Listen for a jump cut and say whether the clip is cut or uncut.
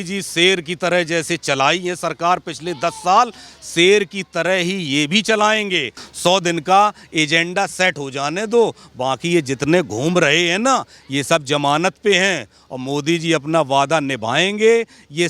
cut